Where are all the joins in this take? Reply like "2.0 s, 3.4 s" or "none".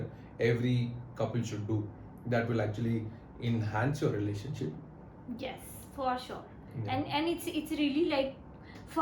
none